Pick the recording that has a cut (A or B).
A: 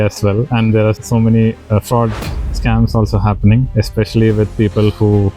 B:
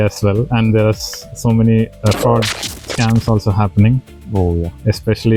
A